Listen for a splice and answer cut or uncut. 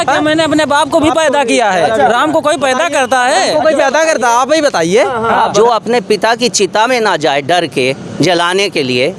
cut